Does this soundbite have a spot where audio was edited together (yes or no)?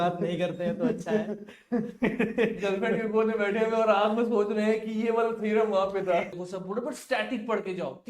yes